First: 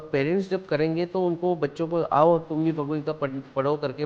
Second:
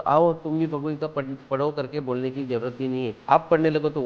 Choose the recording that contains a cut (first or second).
second